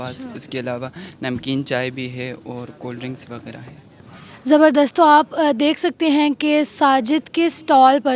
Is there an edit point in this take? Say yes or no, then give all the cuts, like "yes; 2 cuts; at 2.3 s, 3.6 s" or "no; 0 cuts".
no; 0 cuts